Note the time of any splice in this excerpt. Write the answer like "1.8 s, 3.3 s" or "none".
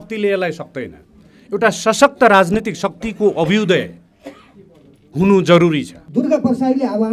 6.0 s